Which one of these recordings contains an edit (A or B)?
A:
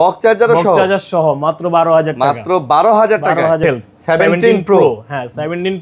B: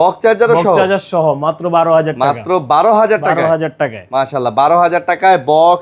A